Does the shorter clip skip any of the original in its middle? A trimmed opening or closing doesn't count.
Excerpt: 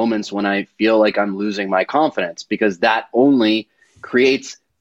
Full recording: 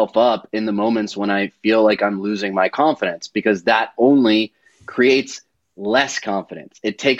no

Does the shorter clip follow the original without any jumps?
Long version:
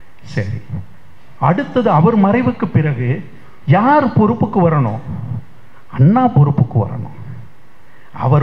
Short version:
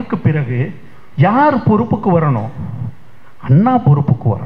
yes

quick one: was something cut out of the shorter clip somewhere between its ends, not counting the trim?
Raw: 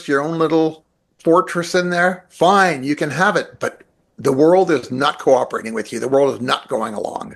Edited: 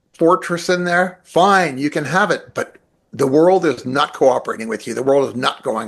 no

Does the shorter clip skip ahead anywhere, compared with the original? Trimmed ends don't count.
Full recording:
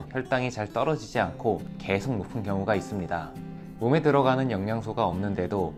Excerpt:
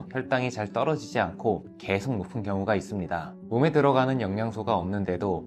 yes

